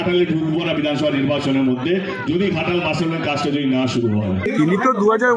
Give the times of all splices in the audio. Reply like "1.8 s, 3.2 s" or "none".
4.4 s